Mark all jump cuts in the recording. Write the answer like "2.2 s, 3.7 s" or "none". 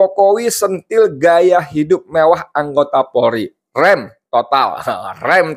none